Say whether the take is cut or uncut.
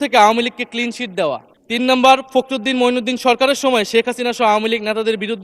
cut